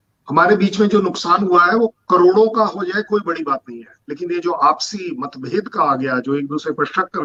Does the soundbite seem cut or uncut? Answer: uncut